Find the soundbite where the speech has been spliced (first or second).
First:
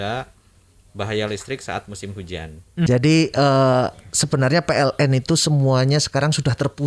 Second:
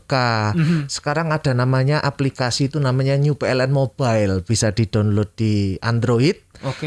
first